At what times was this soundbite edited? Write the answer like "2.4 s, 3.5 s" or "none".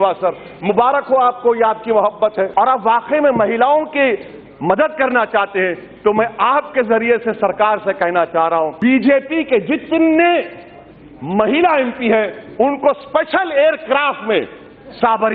2.5 s, 8.7 s